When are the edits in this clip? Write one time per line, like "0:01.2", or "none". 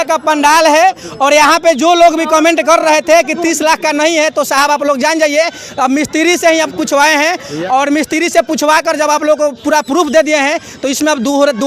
none